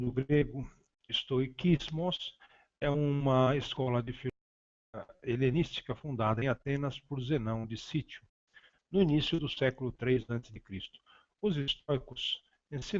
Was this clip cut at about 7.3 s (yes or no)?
yes